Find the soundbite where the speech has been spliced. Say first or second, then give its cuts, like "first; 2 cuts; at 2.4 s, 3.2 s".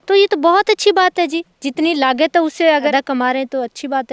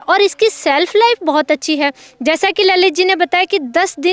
first; 1 cut; at 2.9 s